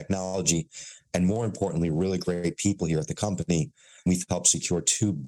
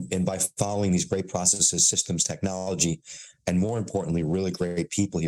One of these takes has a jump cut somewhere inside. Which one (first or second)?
first